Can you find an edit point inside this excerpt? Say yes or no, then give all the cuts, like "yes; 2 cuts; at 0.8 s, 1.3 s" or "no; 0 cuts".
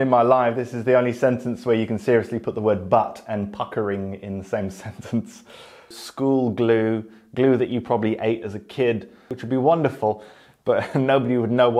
yes; 2 cuts; at 6.0 s, 9.3 s